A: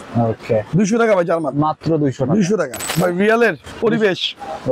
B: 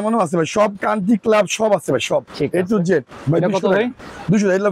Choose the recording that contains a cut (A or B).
A